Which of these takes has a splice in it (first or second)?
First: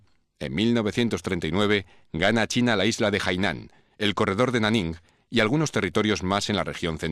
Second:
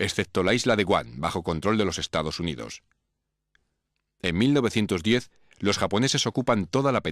second